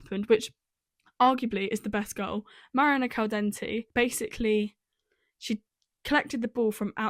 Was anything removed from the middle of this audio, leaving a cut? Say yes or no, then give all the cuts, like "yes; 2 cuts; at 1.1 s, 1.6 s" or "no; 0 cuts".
yes; 1 cut; at 3.8 s